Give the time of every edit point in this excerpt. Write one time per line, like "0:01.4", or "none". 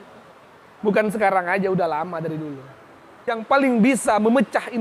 0:03.3